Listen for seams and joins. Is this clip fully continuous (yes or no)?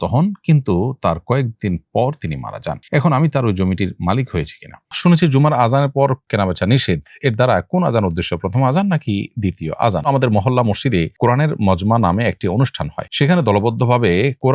no